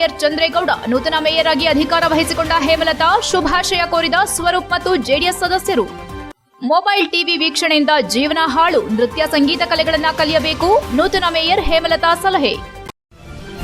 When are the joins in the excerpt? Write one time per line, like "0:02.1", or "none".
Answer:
0:12.7